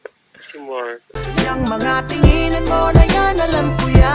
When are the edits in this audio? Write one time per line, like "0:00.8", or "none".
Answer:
0:01.1